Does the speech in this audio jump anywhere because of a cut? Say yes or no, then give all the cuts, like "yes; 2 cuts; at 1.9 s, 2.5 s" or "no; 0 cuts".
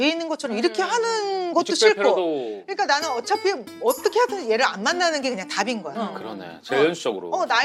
no; 0 cuts